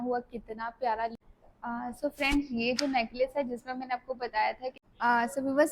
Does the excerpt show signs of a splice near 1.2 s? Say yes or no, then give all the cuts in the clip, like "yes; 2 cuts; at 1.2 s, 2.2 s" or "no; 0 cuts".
yes; 2 cuts; at 1.2 s, 4.8 s